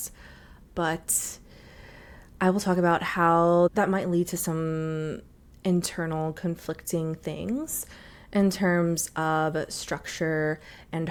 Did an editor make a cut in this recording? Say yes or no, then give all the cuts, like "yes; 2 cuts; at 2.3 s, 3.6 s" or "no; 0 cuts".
no; 0 cuts